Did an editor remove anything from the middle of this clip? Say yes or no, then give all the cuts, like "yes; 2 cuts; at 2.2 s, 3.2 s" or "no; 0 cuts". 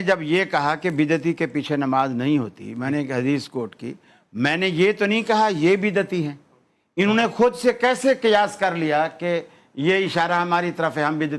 no; 0 cuts